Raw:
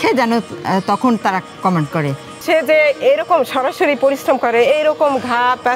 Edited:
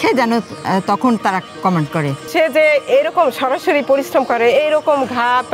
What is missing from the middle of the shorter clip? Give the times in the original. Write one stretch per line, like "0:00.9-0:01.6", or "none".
0:02.2-0:02.3